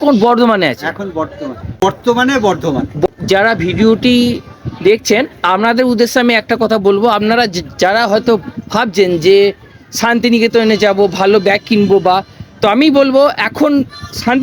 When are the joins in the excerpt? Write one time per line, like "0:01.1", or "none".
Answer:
0:01.8
0:03.1